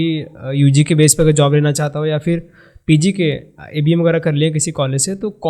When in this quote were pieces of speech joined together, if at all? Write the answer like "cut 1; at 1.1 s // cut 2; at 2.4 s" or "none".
none

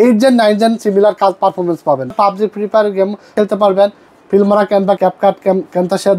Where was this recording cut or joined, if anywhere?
cut 1; at 2.1 s // cut 2; at 3.3 s // cut 3; at 5.0 s

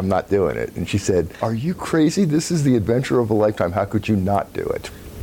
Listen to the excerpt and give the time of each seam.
cut 1; at 1.3 s

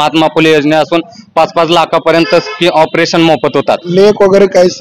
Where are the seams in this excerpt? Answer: cut 1; at 3.9 s

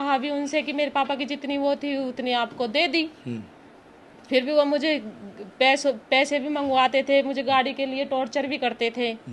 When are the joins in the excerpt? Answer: none

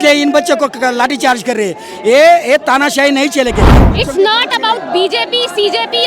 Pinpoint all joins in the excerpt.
cut 1; at 3.8 s

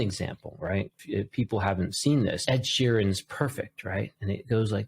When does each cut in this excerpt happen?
cut 1; at 1.0 s // cut 2; at 2.4 s

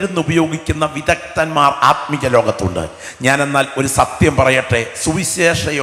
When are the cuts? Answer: none

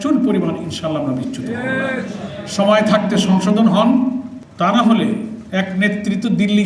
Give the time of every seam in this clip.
cut 1; at 4.4 s // cut 2; at 5.4 s

